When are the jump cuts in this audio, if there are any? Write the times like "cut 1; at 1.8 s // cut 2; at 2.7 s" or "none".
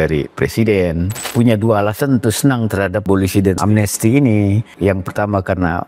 cut 1; at 1.2 s // cut 2; at 3.1 s // cut 3; at 4.7 s

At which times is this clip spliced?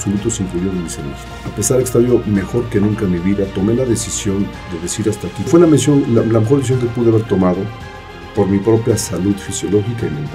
cut 1; at 1.4 s // cut 2; at 5.5 s

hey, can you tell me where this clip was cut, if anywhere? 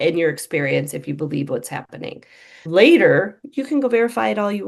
cut 1; at 2.5 s

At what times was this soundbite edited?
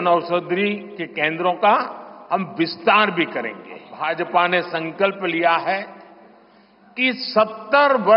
cut 1; at 3.9 s

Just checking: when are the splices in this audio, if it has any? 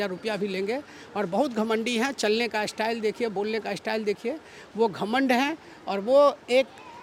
none

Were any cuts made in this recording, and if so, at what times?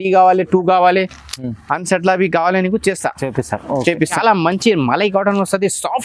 cut 1; at 4.1 s

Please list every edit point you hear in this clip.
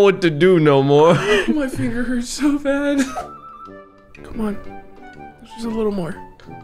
cut 1; at 3.2 s

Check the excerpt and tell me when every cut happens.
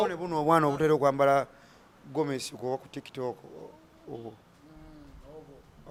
none

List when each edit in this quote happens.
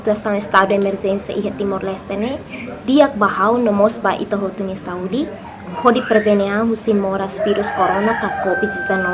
none

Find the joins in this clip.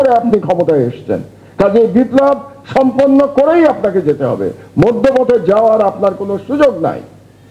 none

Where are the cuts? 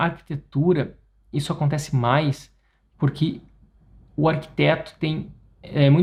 none

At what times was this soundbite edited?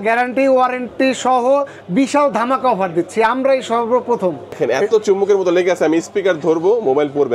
cut 1; at 4.6 s

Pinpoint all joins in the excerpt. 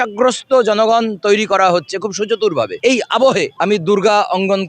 cut 1; at 2.7 s // cut 2; at 3.5 s

